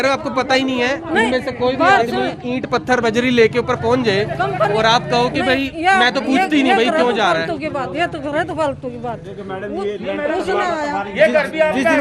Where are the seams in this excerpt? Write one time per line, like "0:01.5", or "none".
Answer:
none

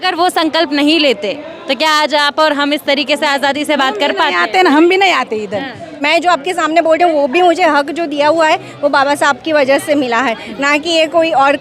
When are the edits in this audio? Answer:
0:06.0

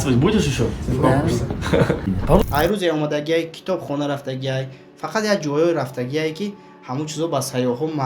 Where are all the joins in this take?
0:02.4

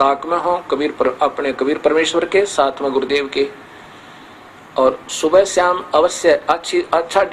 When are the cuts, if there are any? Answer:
none

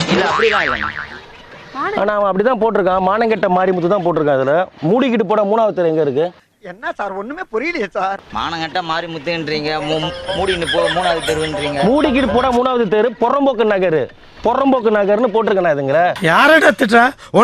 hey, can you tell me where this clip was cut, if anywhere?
none

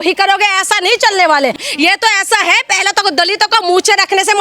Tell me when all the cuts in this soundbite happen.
0:01.6

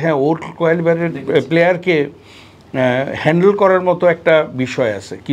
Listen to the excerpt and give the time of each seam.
none

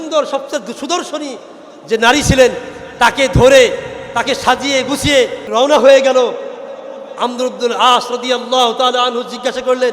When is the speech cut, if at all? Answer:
0:05.5

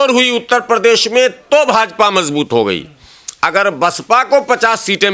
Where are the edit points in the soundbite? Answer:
none

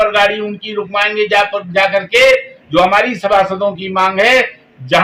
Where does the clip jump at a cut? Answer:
none

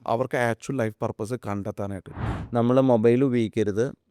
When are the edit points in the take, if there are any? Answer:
0:02.1

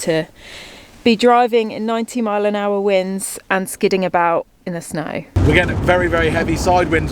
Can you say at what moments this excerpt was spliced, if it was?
0:05.4

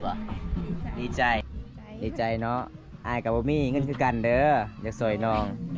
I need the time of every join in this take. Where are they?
0:01.4

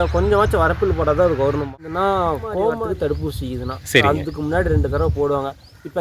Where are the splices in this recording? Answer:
0:01.6
0:02.8

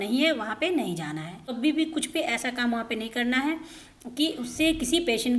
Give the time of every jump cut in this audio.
0:01.5

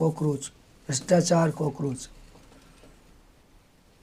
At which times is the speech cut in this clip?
none

